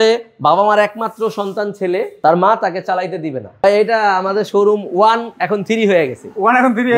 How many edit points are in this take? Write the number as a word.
two